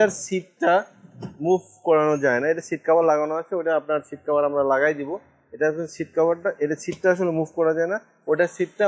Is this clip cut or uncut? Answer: uncut